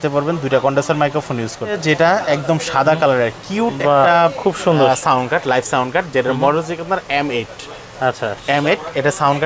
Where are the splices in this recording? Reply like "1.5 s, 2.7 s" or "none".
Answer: 1.8 s